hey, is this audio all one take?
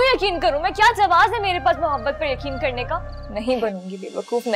no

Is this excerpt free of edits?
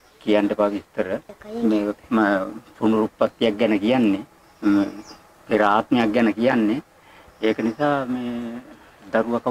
yes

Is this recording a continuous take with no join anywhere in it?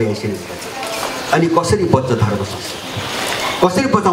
yes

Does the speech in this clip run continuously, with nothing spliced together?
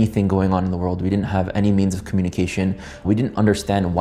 yes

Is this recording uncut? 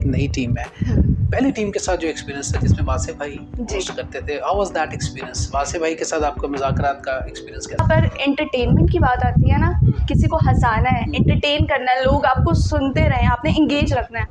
no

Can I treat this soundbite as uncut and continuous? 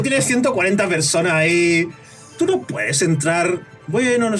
yes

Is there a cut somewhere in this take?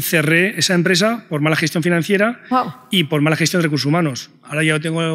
no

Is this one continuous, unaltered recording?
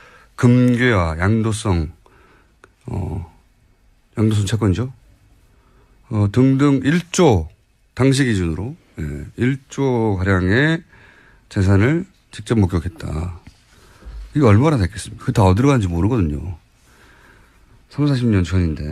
yes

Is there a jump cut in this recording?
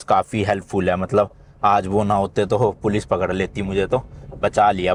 no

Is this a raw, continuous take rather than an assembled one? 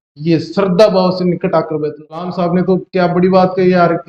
no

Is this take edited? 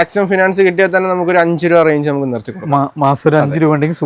no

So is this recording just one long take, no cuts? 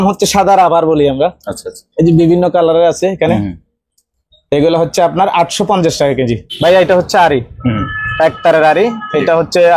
no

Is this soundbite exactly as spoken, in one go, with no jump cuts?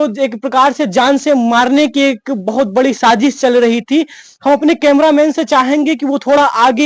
yes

